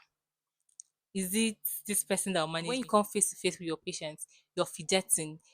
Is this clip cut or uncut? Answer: cut